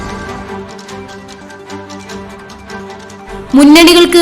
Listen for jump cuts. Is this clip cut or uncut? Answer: cut